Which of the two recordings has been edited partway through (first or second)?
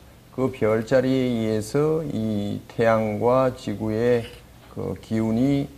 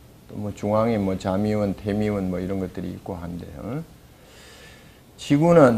second